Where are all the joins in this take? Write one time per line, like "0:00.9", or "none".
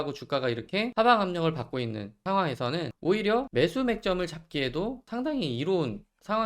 0:00.9
0:02.1
0:02.9
0:03.5
0:05.0